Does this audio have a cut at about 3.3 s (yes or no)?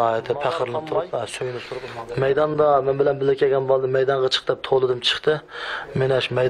no